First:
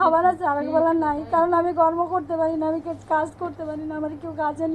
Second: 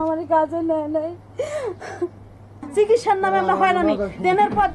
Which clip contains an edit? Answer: second; 1 cut; at 2.6 s

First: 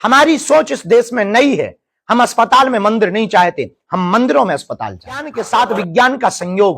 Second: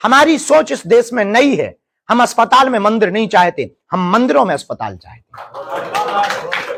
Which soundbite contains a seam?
first; 1 cut; at 5.4 s

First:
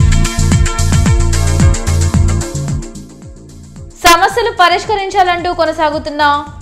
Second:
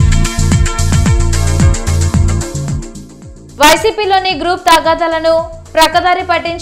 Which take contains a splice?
second; 1 cut; at 3.4 s

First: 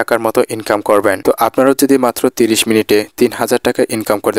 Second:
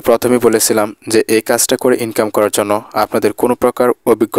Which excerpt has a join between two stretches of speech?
first; 1 cut; at 1.2 s

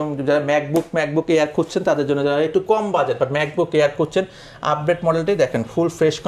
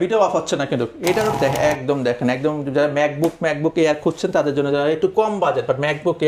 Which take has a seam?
second; 1 cut; at 1.4 s

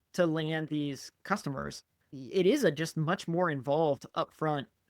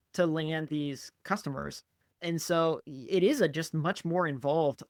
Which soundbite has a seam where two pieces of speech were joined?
first; 1 cut; at 2.1 s

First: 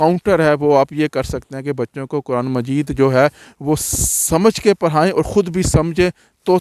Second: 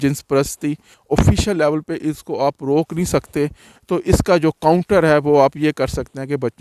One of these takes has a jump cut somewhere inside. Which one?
second; 2 cuts; at 0.9 s, 3.7 s

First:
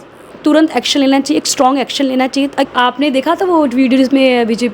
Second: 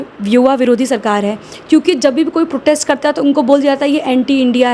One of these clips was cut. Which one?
first; 1 cut; at 2.7 s

